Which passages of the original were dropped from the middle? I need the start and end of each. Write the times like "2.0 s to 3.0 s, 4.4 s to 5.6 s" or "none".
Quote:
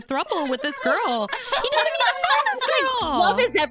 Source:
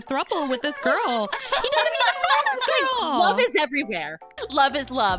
none